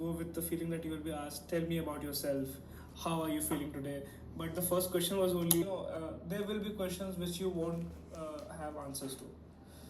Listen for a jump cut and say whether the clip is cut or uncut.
cut